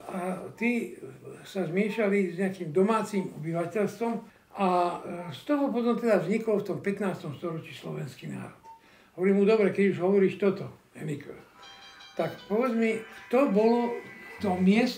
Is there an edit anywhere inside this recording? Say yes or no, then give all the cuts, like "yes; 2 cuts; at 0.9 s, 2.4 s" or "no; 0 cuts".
yes; 1 cut; at 4.4 s